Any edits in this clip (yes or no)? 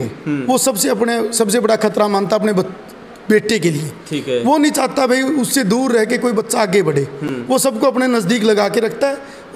no